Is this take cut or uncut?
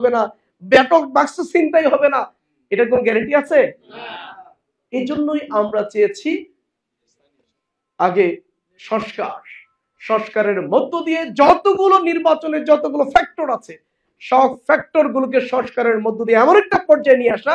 uncut